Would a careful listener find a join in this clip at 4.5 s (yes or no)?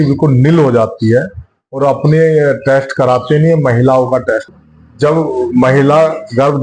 yes